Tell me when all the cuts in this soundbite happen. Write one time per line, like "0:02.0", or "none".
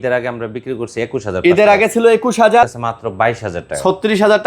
0:02.7